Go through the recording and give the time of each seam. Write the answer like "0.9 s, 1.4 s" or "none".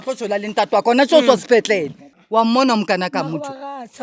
2.1 s